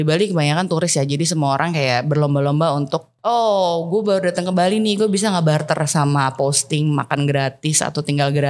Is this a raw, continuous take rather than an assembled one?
no; 1 cut; at 3.1 s

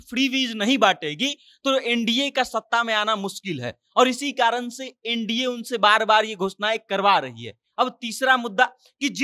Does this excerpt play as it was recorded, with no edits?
yes; 0 cuts

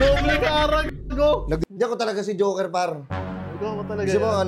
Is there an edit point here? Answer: yes; 1 cut; at 1.6 s

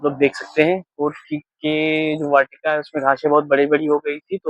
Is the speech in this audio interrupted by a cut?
no; 0 cuts

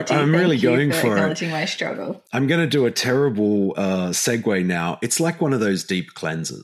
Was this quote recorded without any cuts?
yes; 0 cuts

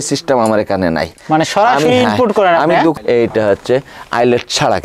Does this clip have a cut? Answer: yes; 1 cut; at 3.0 s

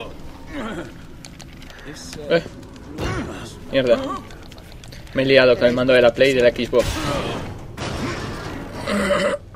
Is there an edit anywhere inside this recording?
no; 0 cuts

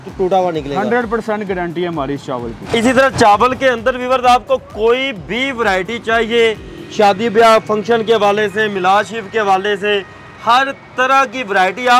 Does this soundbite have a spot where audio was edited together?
no; 0 cuts

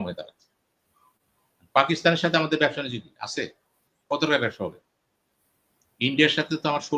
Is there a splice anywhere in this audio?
no; 0 cuts

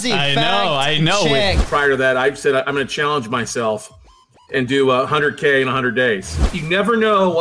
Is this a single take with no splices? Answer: no; 2 cuts; at 1.6 s, 6.5 s

